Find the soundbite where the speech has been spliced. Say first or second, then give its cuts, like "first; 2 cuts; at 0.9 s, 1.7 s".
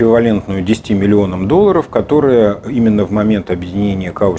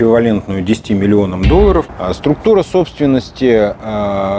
second; 1 cut; at 1.9 s